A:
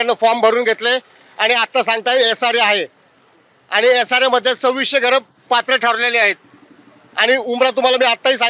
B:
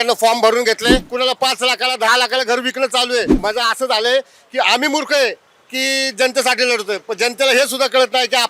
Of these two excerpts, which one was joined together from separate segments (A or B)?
B